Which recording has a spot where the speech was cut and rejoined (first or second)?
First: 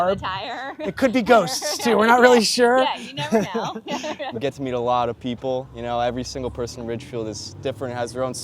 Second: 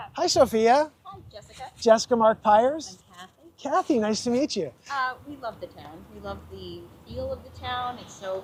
first